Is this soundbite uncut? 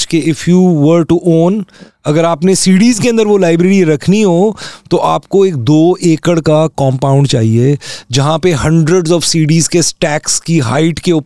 yes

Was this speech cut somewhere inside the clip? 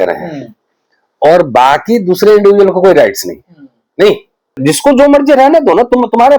yes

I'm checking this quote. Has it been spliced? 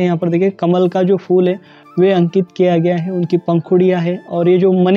no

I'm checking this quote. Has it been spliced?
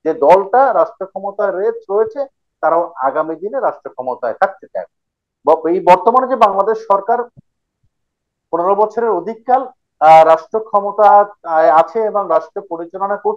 no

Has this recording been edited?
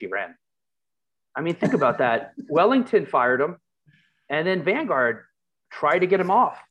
no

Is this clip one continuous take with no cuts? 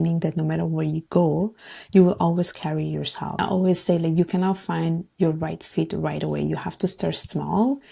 no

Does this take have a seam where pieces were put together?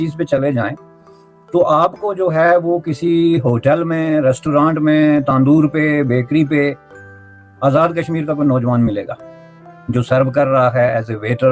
no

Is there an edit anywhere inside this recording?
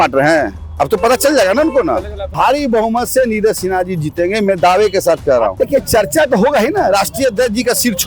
yes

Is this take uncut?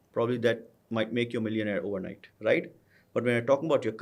no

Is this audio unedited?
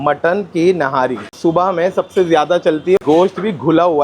no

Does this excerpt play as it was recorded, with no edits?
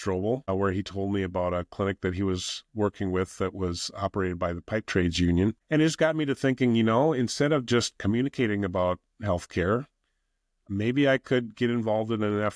yes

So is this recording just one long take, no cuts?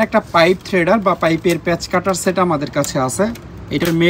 yes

